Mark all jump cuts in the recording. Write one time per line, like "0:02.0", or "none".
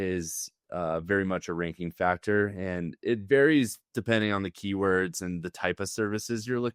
none